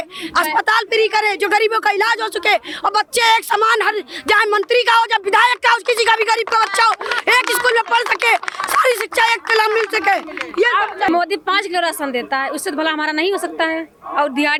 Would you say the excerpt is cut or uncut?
uncut